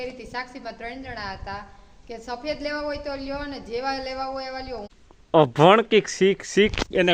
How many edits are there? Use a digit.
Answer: 1